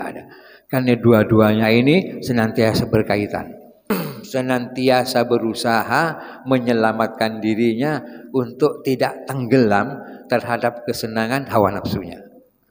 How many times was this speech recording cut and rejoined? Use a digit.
1